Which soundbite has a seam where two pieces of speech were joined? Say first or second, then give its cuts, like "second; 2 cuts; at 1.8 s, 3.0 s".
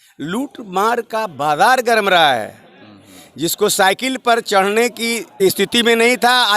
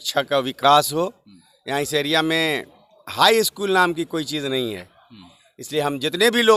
first; 1 cut; at 5.2 s